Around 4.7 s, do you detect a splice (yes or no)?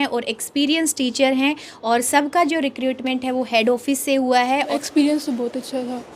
yes